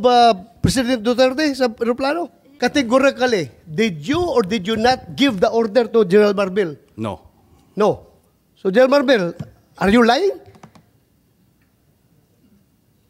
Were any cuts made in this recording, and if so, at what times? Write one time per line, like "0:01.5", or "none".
0:02.4

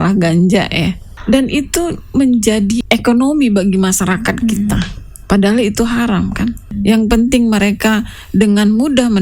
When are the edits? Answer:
0:01.1
0:02.8
0:06.7

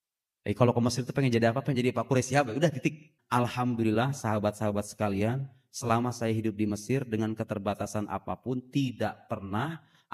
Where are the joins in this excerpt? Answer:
0:03.1

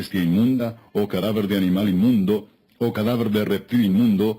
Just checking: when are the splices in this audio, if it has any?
0:02.6

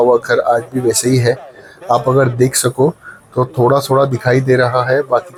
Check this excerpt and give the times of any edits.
none

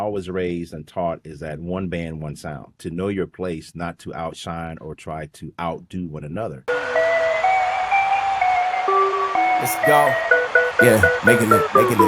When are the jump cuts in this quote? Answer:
0:02.8
0:06.6

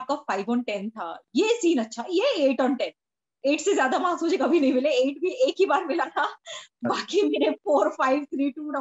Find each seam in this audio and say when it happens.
none

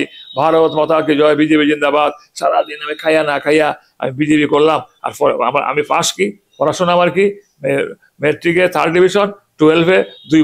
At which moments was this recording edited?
none

